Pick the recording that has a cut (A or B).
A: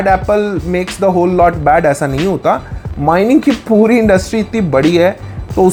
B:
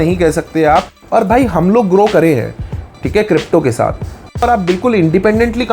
B